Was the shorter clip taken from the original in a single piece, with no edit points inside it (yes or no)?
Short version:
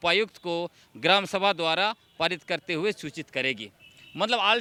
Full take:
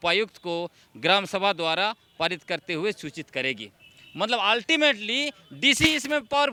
yes